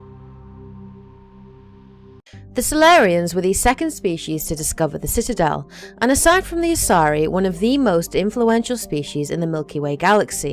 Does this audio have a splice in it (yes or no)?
yes